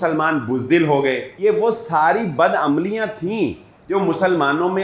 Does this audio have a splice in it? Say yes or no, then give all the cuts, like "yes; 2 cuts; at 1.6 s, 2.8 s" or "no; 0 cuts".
yes; 1 cut; at 1.3 s